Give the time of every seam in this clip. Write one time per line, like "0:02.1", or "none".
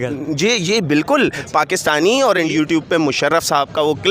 0:02.5

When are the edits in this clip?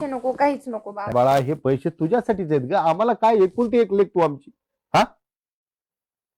0:01.1

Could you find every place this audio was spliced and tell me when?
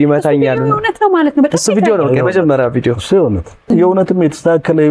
0:03.7

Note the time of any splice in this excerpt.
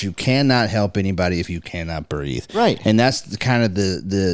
none

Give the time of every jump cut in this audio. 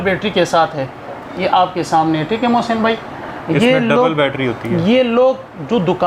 none

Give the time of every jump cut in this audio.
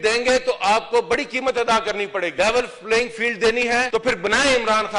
0:02.3
0:03.9

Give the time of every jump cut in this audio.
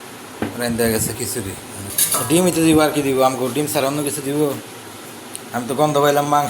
0:02.0

